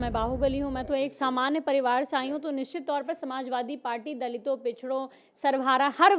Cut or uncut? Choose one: uncut